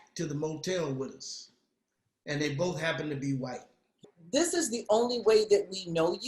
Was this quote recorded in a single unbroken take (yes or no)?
no